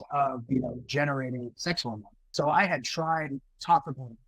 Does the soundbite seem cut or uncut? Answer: cut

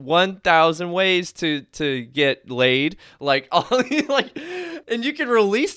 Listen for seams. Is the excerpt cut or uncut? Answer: cut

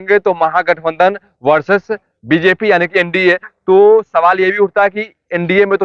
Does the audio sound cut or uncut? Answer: uncut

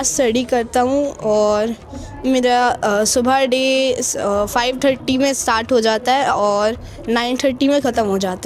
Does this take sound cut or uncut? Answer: uncut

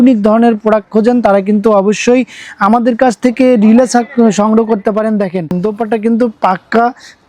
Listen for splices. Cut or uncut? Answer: cut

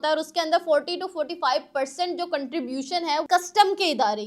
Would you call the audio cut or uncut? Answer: cut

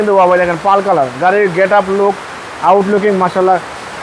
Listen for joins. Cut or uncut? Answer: uncut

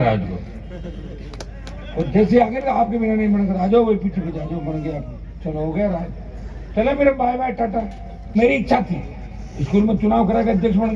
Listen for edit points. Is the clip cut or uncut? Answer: cut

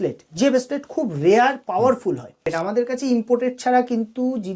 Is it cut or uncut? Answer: cut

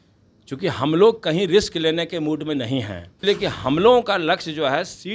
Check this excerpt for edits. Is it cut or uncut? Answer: cut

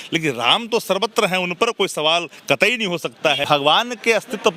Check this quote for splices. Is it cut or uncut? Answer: cut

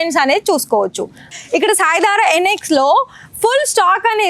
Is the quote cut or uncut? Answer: cut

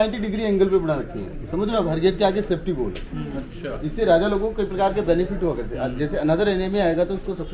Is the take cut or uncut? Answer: uncut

